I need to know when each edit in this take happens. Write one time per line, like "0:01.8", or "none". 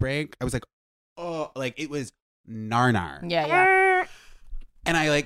none